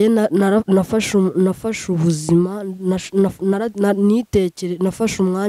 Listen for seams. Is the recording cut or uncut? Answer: uncut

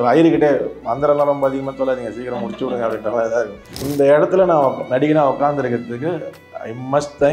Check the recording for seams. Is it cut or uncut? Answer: cut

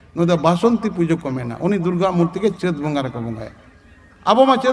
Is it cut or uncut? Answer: uncut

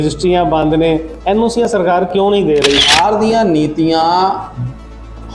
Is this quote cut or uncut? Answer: cut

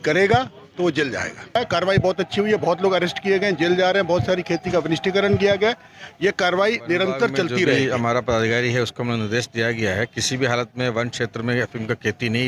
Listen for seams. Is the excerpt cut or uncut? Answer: cut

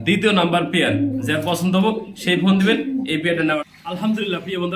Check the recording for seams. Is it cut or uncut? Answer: cut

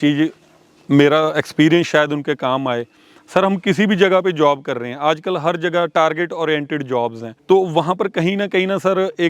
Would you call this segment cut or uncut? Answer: cut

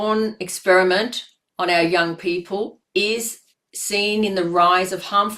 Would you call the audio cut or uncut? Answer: cut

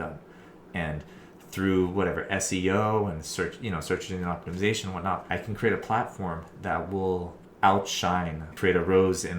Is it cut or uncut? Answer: cut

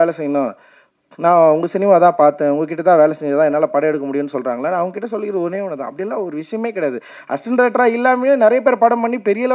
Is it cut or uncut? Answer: uncut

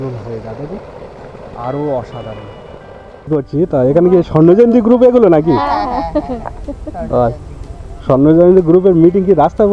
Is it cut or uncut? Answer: cut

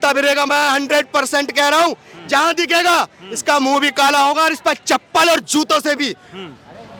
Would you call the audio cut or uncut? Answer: uncut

